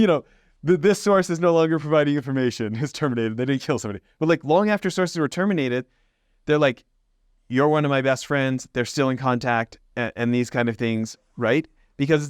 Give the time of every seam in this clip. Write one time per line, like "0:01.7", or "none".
none